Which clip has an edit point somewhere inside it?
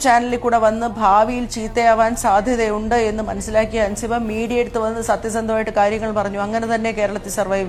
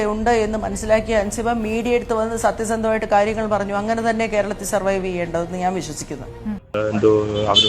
second; 1 cut; at 6.6 s

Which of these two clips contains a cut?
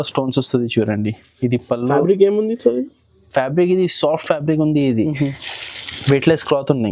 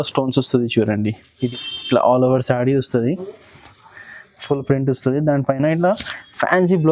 second; 1 cut; at 1.5 s

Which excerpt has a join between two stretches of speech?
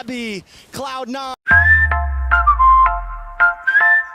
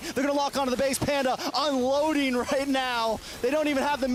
first; 1 cut; at 1.4 s

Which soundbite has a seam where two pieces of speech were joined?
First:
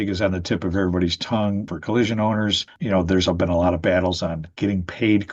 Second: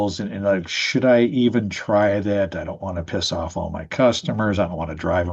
first; 2 cuts; at 1.7 s, 2.7 s

